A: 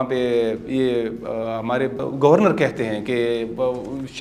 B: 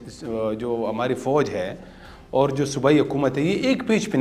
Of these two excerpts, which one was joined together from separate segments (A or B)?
A